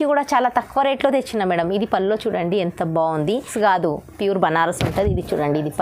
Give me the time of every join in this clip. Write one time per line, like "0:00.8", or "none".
0:03.5